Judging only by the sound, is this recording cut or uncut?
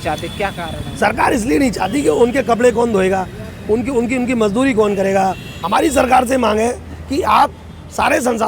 cut